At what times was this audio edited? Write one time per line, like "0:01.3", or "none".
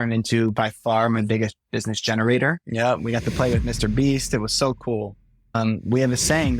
0:02.6
0:05.5